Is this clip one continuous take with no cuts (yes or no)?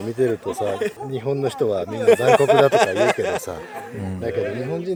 yes